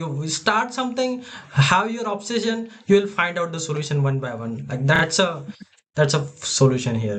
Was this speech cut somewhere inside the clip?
no; 0 cuts

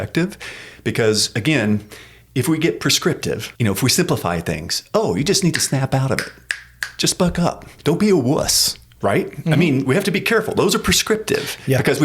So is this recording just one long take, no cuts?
no; 2 cuts; at 3.5 s, 7.7 s

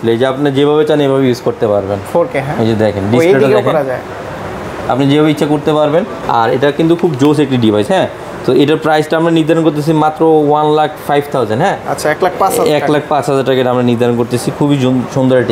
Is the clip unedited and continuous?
yes; 0 cuts

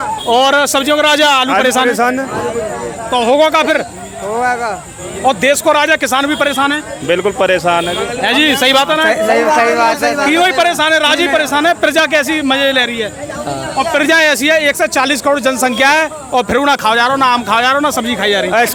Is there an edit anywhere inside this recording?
no; 0 cuts

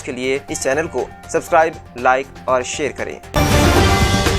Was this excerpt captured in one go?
no; 1 cut; at 3.2 s

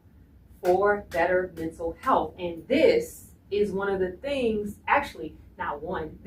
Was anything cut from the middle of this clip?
no; 0 cuts

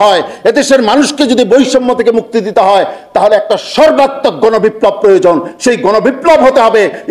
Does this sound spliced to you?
no; 0 cuts

